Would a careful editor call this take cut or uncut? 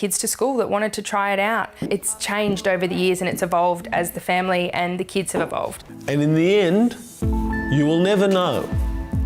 cut